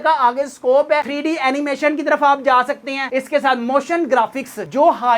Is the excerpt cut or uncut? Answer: cut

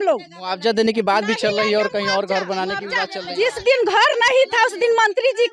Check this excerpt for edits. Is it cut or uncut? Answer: uncut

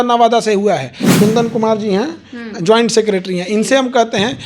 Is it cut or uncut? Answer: cut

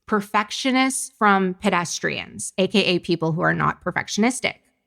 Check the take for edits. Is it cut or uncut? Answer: cut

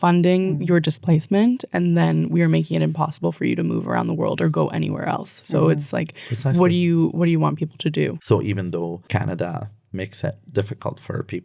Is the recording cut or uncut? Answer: uncut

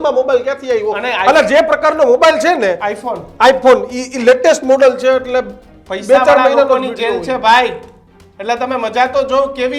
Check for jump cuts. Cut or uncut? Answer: uncut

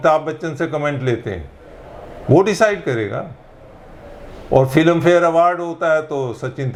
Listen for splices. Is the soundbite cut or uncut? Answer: uncut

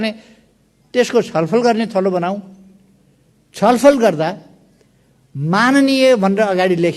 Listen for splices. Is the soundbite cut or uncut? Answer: uncut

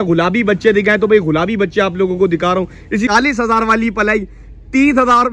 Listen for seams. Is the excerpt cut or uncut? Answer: cut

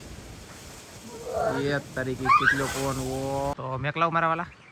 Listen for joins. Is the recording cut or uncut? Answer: cut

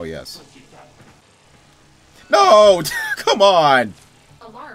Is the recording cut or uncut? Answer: cut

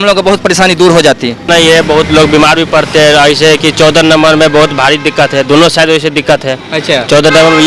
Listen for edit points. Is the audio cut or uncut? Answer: cut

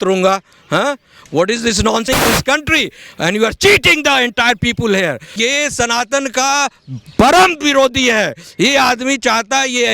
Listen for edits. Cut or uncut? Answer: cut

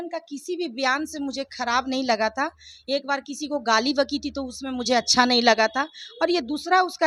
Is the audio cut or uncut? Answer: uncut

